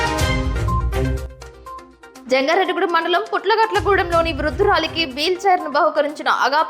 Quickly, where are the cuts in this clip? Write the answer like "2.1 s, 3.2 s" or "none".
1.7 s